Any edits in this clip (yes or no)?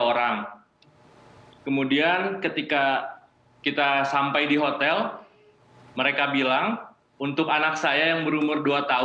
no